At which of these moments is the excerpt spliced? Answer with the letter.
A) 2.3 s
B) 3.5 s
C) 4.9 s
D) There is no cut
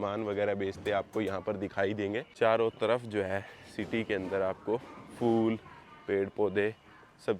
A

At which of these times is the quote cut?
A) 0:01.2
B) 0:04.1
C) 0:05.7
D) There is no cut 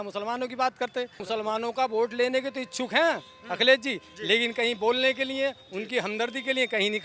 A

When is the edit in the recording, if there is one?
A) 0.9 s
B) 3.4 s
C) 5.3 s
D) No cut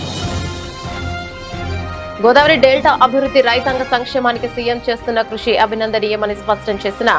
A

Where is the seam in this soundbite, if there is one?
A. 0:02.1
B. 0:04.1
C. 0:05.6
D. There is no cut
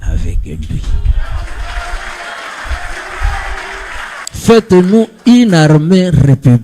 B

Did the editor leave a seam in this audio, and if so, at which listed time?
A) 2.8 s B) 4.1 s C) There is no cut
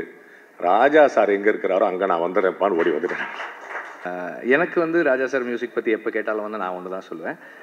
B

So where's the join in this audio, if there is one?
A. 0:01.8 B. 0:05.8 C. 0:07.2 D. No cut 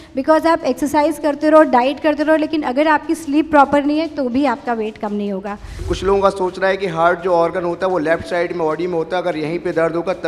B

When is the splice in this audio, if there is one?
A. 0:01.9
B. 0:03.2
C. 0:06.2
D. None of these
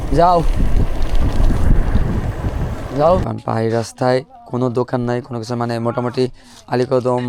B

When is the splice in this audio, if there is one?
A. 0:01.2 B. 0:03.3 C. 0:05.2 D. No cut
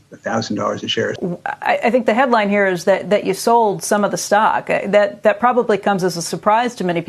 A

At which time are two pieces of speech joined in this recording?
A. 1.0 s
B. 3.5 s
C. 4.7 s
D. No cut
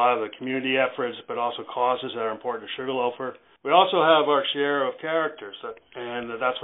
B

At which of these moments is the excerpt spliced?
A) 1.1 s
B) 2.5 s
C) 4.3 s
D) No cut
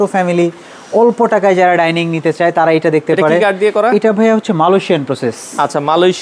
D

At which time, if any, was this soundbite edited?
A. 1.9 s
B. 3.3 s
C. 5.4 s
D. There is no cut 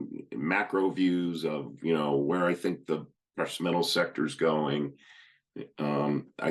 D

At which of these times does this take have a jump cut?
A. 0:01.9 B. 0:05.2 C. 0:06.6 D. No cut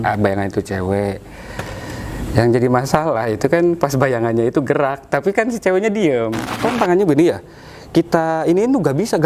C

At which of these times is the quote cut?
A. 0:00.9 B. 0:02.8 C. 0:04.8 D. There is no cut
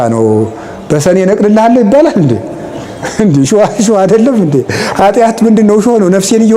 D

